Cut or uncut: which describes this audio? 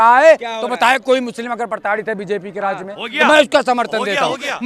uncut